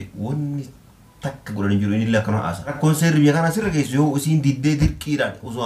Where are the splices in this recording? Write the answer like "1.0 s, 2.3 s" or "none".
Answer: 2.8 s